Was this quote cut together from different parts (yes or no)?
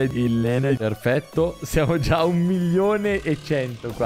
no